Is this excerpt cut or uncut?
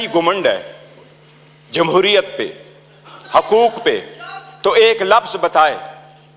uncut